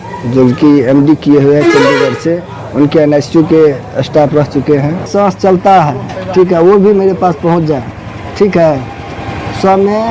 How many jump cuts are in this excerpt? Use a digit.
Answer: 1